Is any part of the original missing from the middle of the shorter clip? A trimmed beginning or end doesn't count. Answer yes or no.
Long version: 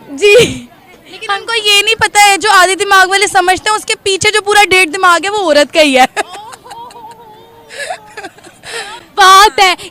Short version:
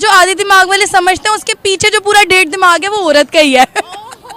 no